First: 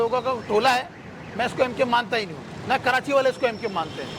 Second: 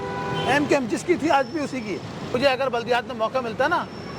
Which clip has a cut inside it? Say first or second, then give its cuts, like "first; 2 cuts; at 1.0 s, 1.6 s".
second; 1 cut; at 2.3 s